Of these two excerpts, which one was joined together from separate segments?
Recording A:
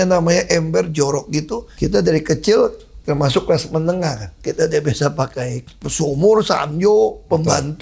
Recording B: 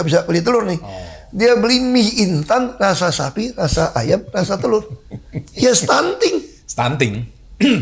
A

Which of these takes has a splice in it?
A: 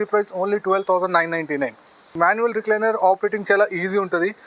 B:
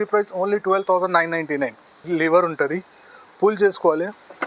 B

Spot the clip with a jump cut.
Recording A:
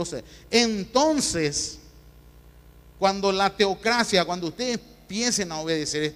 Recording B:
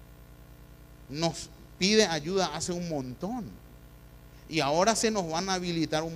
A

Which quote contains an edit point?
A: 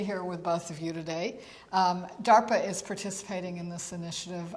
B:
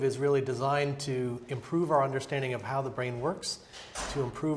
B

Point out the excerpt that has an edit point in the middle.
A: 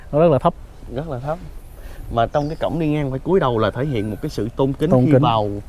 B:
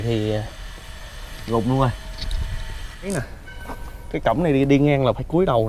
B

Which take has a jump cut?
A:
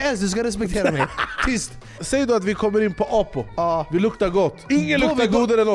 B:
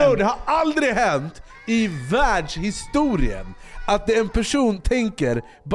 A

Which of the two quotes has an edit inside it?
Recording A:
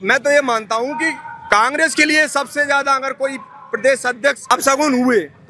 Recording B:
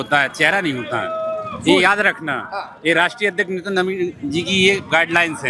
A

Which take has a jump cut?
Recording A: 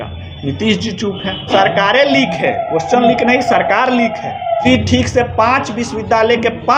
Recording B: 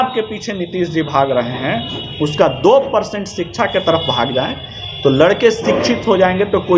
A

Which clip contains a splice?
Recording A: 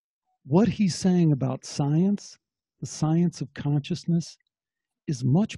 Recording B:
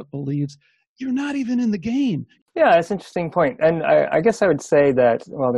B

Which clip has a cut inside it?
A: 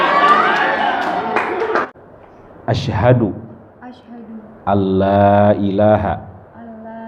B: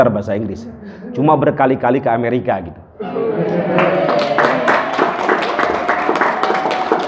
A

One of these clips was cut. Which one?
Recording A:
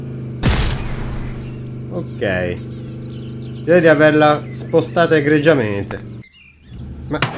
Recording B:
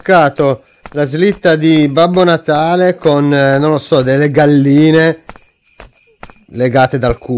A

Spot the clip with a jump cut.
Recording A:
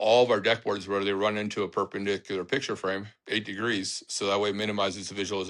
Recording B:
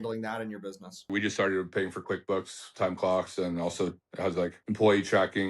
B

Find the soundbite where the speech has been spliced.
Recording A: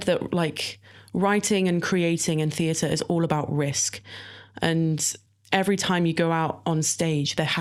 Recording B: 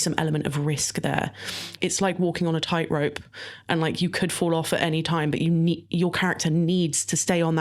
B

